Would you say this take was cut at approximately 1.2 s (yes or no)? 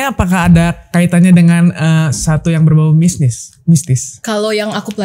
no